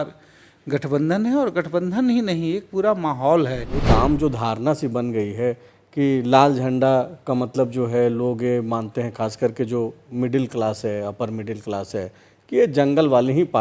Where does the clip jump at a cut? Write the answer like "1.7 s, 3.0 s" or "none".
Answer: 3.7 s